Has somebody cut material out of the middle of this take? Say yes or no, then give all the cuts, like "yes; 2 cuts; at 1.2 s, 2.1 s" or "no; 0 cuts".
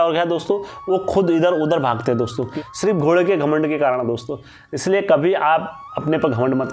yes; 1 cut; at 2.5 s